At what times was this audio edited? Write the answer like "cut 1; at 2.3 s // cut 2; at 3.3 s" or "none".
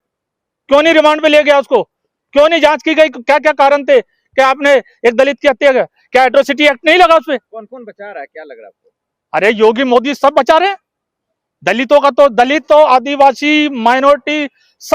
cut 1; at 7.5 s